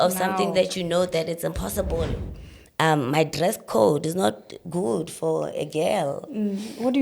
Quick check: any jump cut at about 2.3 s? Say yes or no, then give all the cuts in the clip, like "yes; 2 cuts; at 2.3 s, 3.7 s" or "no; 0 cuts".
yes; 1 cut; at 2.3 s